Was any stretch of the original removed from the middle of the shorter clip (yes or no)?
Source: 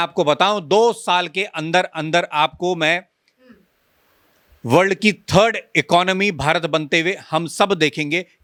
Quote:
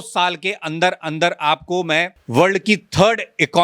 yes